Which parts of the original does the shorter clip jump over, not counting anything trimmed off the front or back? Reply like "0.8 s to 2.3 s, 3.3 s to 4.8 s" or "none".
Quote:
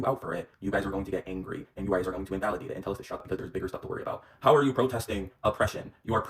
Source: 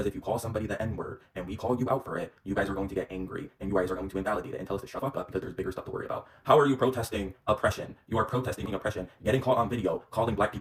5.0 s to 5.2 s